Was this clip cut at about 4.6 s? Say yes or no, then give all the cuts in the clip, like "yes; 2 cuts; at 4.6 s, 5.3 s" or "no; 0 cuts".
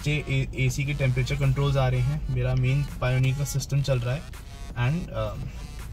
no; 0 cuts